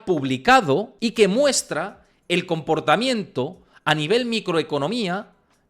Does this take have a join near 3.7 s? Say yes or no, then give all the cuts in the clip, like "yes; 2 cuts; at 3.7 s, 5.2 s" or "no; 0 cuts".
no; 1 cut; at 0.9 s